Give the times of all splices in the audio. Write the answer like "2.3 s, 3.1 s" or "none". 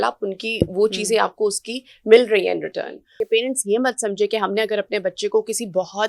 3.0 s